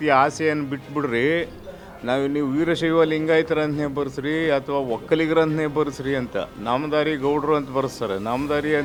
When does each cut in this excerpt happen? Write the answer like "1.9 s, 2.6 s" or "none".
none